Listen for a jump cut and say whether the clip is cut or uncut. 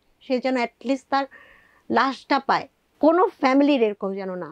cut